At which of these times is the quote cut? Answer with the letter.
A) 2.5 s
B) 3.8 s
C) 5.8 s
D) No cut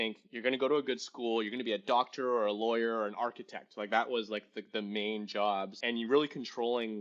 C